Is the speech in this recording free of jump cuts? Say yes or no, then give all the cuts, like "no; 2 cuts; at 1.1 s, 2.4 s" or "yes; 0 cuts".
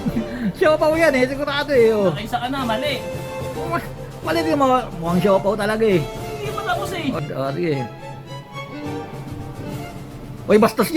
no; 1 cut; at 7.2 s